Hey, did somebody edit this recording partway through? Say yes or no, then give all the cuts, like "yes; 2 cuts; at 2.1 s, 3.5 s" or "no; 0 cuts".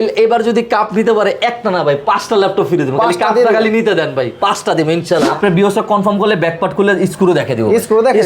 yes; 1 cut; at 5.3 s